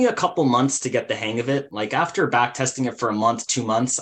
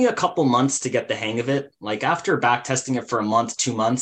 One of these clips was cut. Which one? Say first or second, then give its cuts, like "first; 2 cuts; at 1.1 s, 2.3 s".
first; 1 cut; at 1.7 s